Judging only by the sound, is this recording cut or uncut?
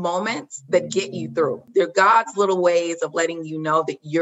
cut